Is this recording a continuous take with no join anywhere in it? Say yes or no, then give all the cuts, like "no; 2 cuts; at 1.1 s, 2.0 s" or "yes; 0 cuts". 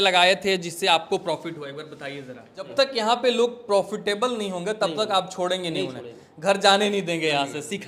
no; 1 cut; at 2.7 s